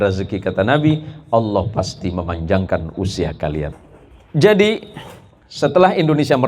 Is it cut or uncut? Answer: cut